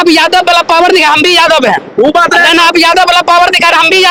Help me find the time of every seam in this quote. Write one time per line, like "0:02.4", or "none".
none